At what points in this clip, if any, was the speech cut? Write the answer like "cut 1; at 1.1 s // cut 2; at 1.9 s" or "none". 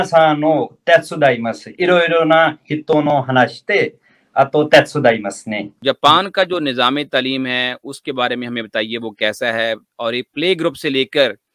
cut 1; at 5.7 s